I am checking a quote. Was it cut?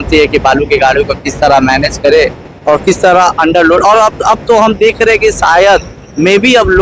no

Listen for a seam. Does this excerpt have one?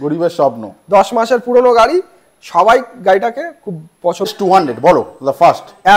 yes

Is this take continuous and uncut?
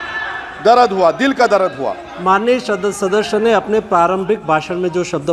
no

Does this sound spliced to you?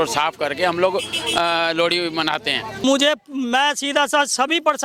yes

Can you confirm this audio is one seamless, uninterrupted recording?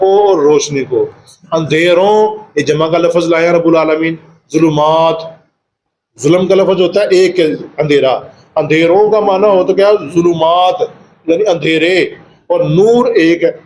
yes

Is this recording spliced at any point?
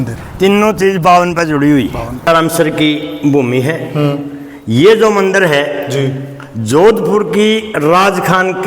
yes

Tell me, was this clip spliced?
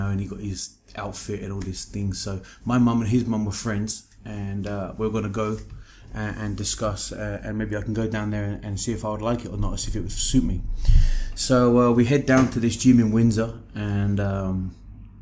no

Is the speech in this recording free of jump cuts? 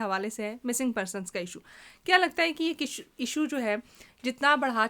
yes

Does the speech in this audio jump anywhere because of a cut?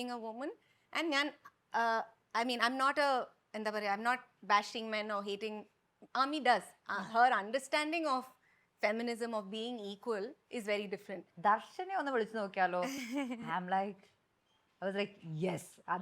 yes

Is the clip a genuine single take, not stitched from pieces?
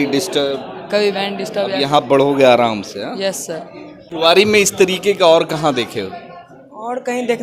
no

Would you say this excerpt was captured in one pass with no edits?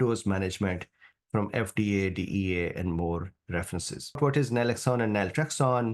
no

